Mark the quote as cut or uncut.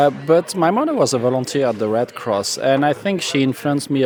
uncut